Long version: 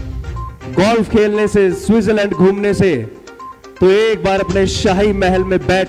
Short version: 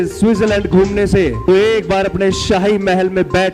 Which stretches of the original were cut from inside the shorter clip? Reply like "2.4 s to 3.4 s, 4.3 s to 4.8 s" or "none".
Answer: 3.0 s to 3.7 s